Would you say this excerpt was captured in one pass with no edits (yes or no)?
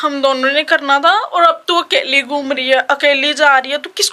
yes